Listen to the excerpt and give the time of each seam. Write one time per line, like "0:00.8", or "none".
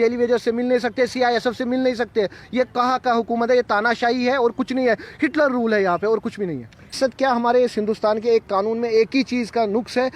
0:06.9